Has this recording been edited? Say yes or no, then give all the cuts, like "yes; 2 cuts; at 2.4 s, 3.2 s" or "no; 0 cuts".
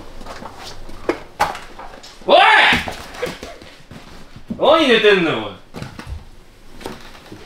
no; 0 cuts